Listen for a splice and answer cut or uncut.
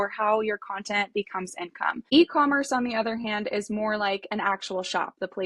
cut